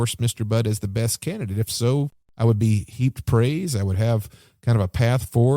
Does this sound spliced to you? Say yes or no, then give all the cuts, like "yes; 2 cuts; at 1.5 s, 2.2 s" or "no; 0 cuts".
yes; 1 cut; at 2.2 s